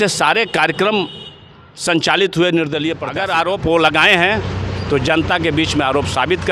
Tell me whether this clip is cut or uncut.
cut